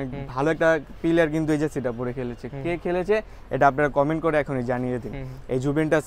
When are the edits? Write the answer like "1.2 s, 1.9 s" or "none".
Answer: none

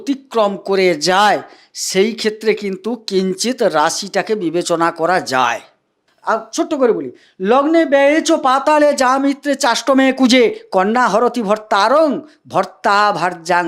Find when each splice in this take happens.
6.1 s

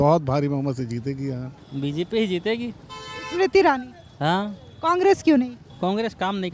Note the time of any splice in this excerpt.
1.6 s, 5.6 s

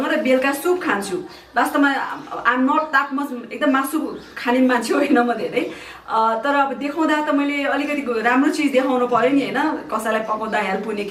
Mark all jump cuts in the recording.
none

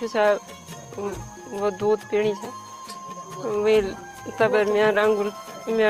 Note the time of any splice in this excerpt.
none

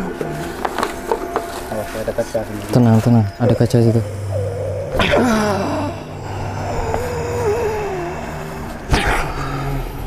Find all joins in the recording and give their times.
none

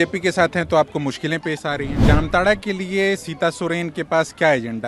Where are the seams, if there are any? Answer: 2.0 s

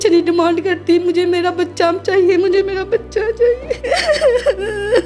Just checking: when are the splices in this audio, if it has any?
3.8 s

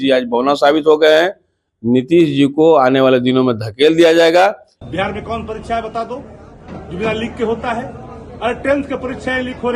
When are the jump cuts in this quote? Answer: 4.7 s

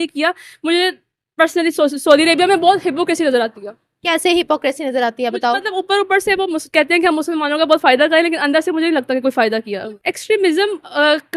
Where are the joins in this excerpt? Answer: 9.8 s

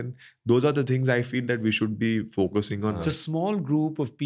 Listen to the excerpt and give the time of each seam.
3.0 s

